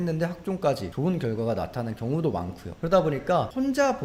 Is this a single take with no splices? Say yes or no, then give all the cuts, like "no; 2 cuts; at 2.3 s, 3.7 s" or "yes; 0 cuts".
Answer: yes; 0 cuts